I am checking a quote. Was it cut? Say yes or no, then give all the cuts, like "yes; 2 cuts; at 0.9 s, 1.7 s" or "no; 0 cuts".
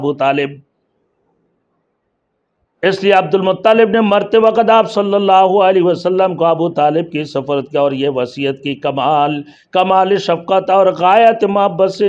no; 0 cuts